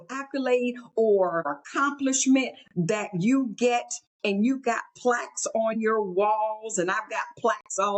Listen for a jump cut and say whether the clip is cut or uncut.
cut